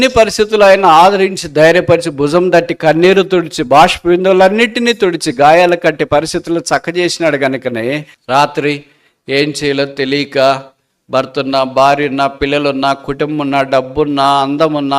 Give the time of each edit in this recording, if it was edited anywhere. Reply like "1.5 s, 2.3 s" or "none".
8.1 s